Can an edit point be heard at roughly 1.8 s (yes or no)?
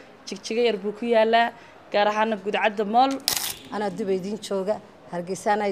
no